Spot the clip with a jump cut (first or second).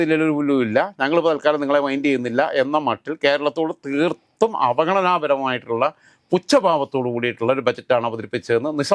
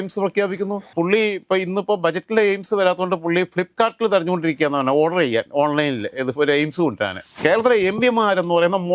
second